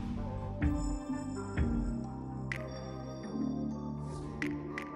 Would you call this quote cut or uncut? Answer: cut